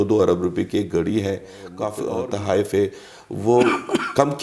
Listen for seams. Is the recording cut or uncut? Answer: cut